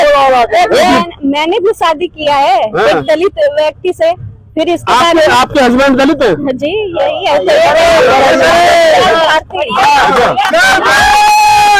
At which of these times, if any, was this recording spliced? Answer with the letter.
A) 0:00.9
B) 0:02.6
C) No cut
A